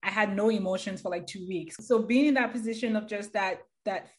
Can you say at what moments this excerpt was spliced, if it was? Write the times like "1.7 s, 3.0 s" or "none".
1.8 s